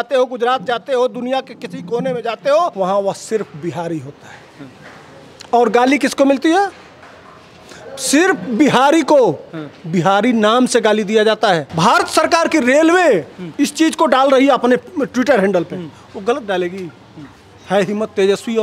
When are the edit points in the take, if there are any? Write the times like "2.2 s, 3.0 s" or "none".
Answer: 2.7 s, 11.7 s